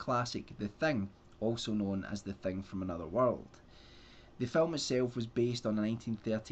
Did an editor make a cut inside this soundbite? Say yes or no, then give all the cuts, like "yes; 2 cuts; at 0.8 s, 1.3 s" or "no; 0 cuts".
no; 0 cuts